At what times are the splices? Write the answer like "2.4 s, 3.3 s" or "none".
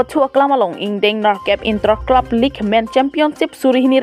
none